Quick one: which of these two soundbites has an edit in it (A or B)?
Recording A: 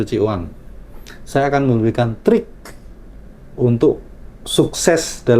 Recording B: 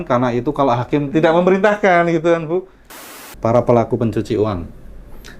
B